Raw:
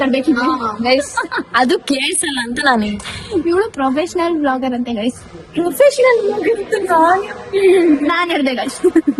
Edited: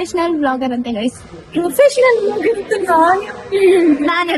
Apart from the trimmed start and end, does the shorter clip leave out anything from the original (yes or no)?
no